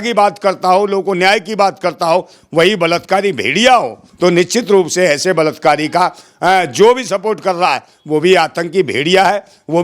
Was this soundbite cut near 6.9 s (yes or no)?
no